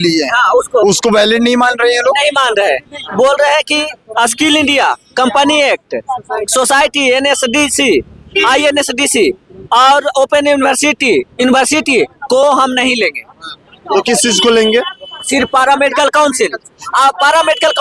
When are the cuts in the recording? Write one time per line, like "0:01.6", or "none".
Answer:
none